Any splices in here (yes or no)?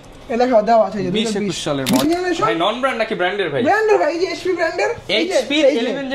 yes